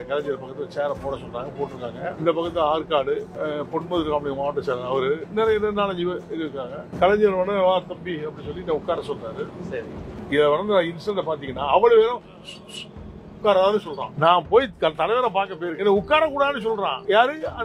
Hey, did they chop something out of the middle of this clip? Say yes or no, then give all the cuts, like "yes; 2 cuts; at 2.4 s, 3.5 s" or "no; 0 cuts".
yes; 1 cut; at 5.3 s